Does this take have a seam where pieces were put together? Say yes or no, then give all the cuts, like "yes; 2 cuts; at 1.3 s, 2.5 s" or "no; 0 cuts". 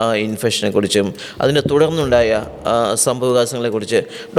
no; 0 cuts